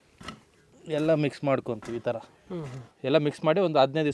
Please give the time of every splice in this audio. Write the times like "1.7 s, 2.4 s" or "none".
2.9 s